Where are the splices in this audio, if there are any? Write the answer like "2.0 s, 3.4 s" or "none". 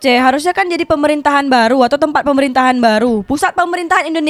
none